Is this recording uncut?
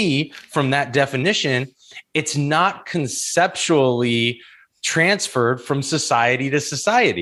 yes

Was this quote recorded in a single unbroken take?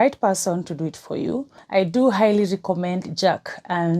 no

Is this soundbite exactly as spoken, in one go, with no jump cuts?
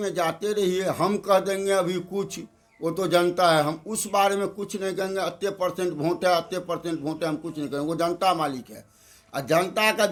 yes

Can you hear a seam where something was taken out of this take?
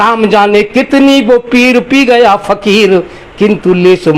no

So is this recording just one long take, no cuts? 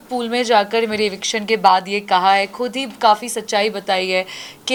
yes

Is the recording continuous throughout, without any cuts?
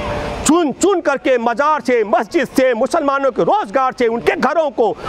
yes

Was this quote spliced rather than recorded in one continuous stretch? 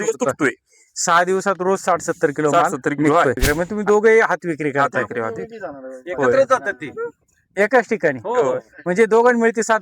yes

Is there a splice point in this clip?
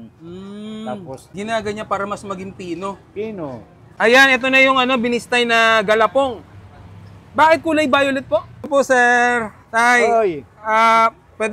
yes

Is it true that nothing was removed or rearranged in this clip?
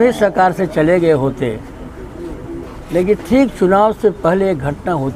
yes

